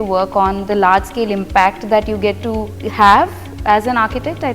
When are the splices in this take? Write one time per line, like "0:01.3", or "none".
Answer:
0:02.8